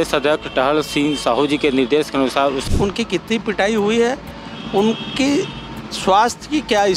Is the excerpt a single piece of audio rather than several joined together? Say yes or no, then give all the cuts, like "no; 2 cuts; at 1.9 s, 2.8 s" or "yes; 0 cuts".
no; 1 cut; at 2.6 s